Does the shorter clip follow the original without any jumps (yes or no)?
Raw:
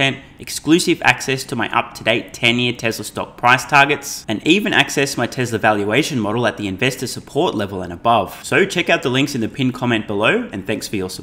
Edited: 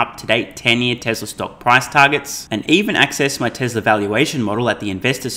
yes